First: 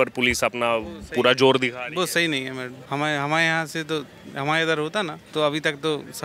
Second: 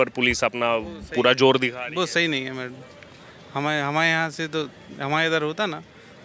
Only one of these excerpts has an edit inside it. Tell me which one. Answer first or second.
first